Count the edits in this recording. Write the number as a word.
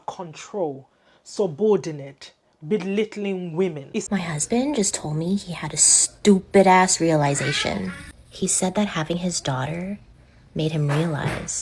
one